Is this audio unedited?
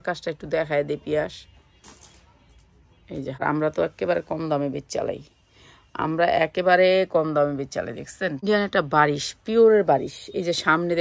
no; 2 cuts; at 3.4 s, 8.4 s

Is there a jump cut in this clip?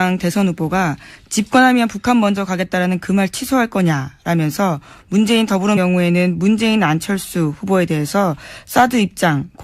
no; 0 cuts

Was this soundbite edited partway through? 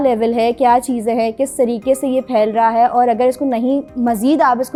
no; 0 cuts

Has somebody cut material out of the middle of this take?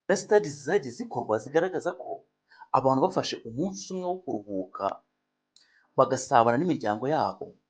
no; 0 cuts

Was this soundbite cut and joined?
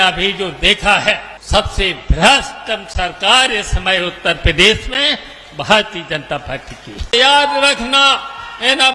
yes; 2 cuts; at 1.3 s, 7.1 s

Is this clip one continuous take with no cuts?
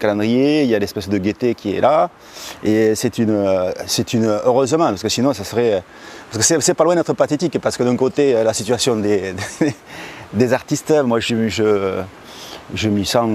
no; 1 cut; at 4.1 s

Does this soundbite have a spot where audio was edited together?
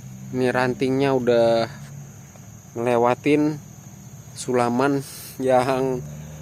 no; 0 cuts

